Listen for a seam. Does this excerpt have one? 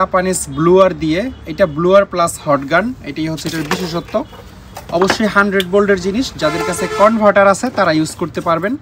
no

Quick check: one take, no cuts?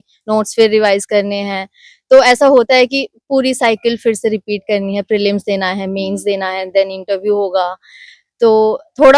yes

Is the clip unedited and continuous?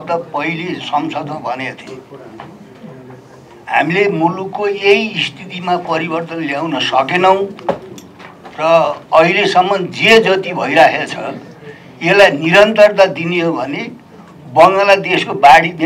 yes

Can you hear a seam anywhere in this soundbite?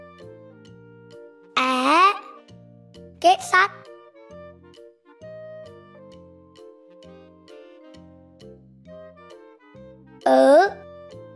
no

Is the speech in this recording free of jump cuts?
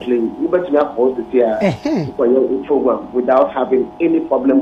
yes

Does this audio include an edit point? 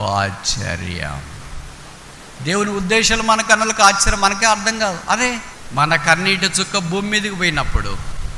yes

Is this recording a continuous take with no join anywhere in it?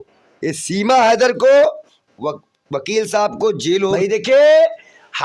no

